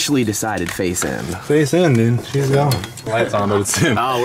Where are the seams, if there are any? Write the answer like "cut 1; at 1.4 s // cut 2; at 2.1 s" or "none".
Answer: cut 1; at 2.9 s